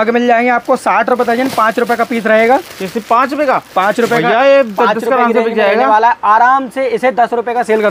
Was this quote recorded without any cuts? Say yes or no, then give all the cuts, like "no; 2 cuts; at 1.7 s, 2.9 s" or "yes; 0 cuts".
yes; 0 cuts